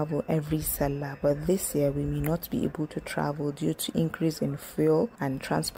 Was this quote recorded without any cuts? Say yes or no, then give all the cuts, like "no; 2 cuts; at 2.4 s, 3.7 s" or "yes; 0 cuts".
yes; 0 cuts